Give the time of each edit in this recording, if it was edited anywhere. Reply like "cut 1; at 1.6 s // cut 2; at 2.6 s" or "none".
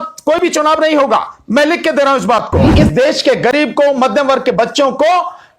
cut 1; at 2.7 s